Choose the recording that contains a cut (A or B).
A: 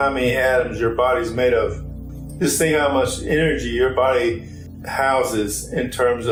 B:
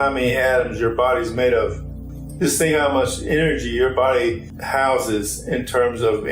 B